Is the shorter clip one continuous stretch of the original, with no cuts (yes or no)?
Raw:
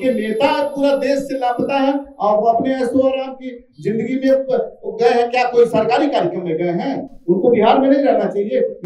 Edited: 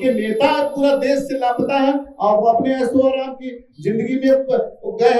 yes